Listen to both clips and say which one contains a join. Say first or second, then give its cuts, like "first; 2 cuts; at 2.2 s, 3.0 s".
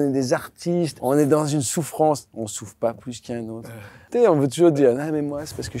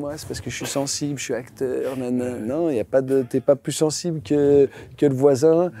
first; 2 cuts; at 0.9 s, 3.9 s